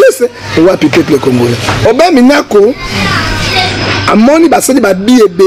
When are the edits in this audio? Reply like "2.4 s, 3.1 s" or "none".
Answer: 1.8 s